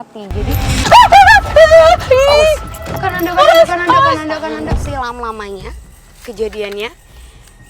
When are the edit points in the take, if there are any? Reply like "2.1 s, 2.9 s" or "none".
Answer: 4.7 s

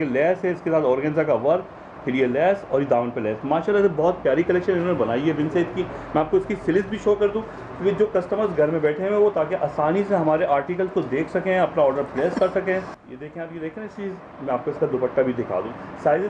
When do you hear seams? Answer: none

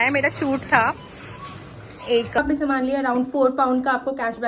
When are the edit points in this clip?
2.4 s

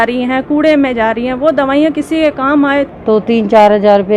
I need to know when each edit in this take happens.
2.9 s

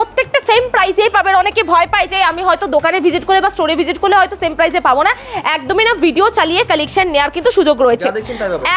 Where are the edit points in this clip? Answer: none

